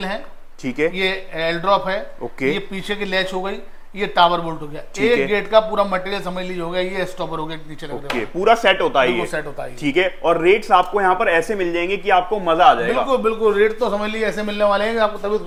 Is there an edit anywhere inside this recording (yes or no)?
no